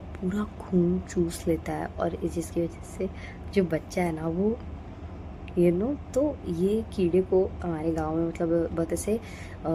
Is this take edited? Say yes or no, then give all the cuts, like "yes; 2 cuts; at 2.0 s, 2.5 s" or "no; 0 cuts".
no; 0 cuts